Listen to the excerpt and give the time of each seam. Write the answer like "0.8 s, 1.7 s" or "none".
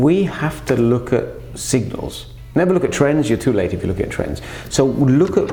none